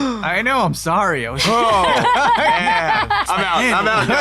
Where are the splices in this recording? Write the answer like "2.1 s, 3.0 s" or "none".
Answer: 3.3 s